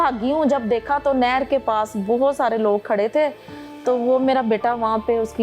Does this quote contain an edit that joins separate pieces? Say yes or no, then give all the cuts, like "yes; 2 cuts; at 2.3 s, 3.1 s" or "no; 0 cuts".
no; 0 cuts